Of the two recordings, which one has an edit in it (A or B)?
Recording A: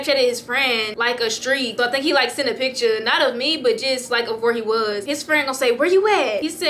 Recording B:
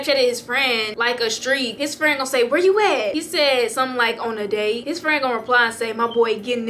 B